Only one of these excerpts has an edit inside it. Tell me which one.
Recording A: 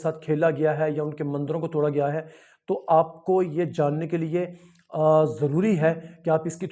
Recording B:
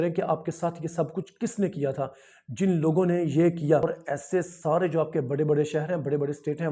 B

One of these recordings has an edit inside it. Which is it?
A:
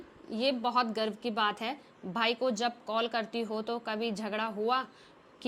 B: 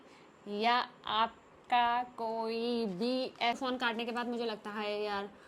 B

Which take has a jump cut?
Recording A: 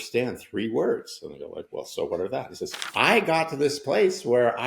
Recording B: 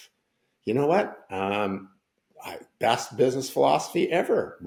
A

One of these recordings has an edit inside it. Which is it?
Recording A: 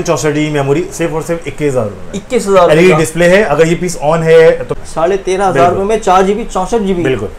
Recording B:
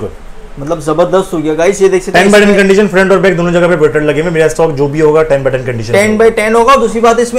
A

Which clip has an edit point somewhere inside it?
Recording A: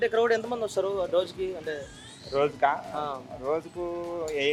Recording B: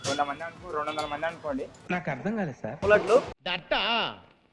B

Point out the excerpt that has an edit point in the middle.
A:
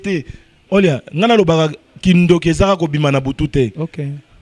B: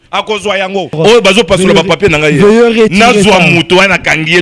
B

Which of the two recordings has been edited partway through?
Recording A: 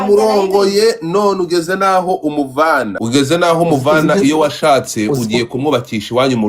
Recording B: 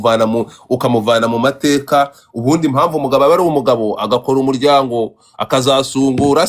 A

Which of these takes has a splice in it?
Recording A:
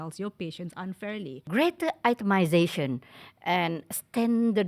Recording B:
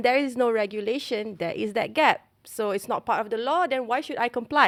A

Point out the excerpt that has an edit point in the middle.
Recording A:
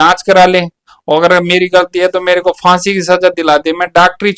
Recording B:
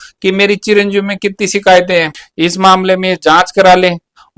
B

